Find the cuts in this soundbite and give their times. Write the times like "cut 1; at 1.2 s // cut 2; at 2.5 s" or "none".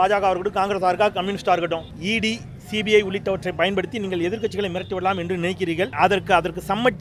cut 1; at 1.9 s // cut 2; at 5.9 s